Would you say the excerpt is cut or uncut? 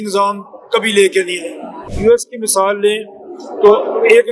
cut